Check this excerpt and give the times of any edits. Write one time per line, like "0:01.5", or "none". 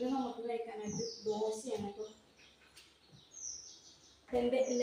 none

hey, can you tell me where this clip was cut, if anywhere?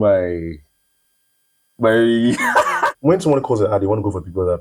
0:02.9

